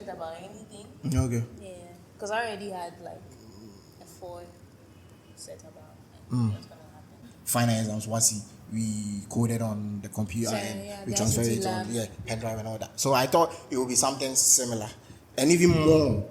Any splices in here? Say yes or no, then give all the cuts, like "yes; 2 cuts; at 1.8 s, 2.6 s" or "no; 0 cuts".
yes; 1 cut; at 7.3 s